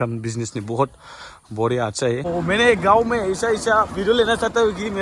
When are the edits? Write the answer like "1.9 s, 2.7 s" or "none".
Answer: 2.3 s